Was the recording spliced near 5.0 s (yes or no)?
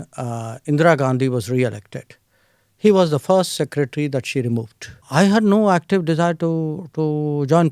yes